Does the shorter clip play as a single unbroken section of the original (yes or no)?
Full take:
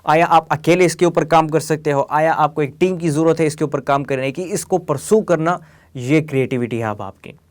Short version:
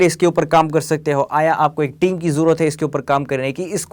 yes